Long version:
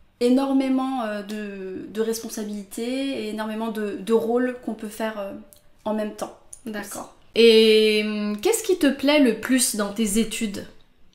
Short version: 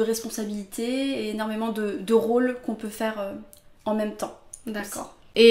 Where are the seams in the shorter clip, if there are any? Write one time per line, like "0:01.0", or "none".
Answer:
none